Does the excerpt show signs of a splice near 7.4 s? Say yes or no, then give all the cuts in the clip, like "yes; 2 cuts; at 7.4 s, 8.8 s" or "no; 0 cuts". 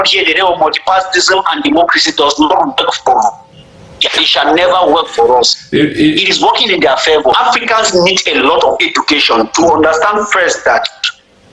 yes; 1 cut; at 7.4 s